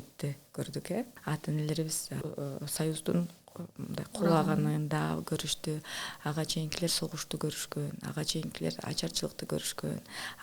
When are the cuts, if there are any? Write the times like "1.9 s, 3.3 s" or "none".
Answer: 1.2 s, 2.2 s